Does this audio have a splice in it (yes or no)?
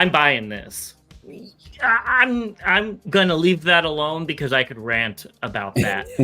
yes